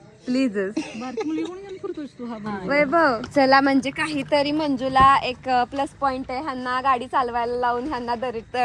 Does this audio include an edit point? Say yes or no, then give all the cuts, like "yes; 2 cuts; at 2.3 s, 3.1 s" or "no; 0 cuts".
yes; 1 cut; at 3.2 s